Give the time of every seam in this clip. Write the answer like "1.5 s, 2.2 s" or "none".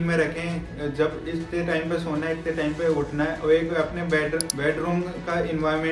4.5 s